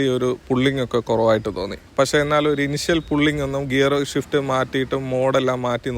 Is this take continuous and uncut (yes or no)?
no